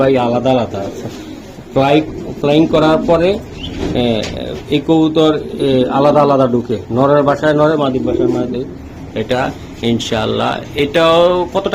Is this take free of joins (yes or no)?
yes